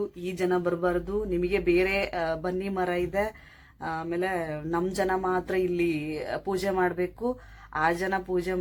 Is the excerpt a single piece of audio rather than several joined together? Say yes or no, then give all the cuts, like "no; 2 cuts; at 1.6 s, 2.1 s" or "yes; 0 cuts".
yes; 0 cuts